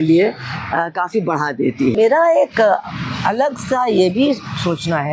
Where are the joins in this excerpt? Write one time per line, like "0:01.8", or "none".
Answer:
0:01.9